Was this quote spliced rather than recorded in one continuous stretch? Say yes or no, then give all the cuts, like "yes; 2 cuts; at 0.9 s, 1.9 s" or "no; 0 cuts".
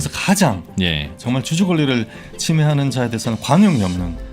yes; 1 cut; at 1.1 s